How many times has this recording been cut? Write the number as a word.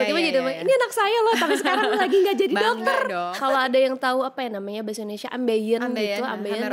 one